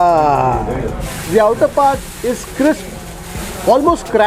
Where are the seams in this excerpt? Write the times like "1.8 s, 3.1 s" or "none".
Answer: 1.1 s